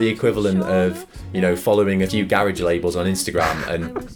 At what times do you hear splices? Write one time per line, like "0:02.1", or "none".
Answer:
0:02.1